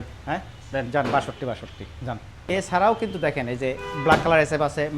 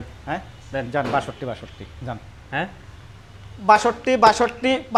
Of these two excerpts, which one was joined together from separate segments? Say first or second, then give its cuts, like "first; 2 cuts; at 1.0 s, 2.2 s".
first; 1 cut; at 2.6 s